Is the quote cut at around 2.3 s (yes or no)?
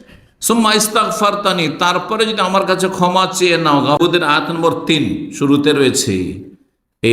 no